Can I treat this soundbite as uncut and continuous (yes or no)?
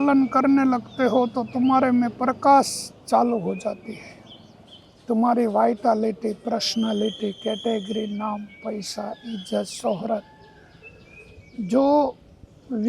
yes